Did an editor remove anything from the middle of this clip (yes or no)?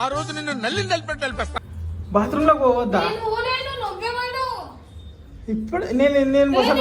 no